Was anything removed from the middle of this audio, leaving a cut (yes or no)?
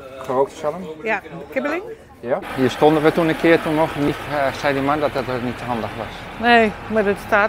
yes